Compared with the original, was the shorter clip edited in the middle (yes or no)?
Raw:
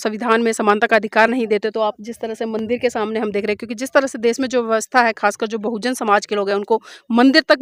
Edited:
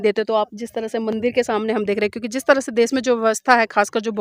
no